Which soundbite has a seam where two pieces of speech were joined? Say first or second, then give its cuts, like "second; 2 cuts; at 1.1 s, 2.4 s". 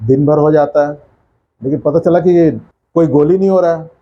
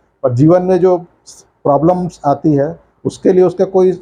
first; 1 cut; at 2.7 s